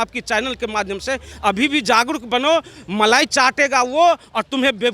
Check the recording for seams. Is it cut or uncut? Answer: uncut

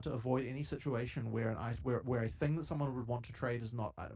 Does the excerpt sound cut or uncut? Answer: cut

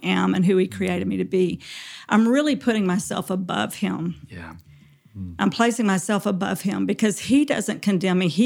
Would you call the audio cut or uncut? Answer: uncut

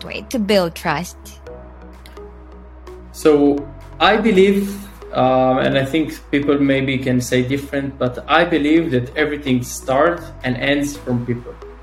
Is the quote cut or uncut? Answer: uncut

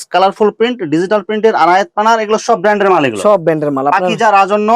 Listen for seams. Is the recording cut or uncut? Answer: uncut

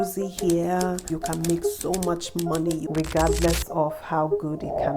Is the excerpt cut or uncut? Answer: cut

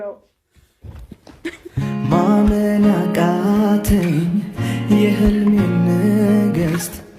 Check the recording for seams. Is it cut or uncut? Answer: cut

